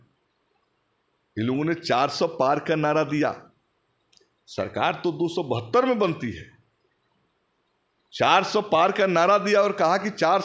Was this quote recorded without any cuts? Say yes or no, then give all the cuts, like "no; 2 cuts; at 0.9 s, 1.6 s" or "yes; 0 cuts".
yes; 0 cuts